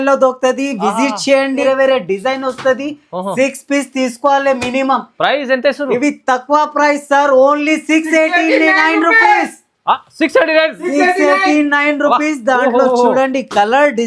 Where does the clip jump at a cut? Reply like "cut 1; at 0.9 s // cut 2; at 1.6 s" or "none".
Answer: cut 1; at 1.6 s